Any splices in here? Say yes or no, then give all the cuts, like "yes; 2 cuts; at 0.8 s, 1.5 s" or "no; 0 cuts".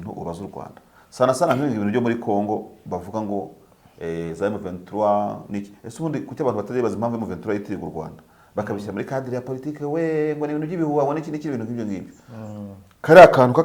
no; 0 cuts